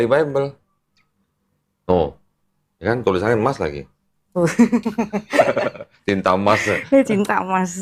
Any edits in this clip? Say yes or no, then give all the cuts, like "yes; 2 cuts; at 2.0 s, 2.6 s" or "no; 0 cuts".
no; 0 cuts